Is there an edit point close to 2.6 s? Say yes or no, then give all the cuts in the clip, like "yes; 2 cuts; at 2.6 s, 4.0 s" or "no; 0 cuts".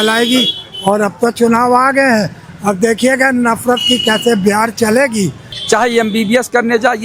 no; 1 cut; at 5.5 s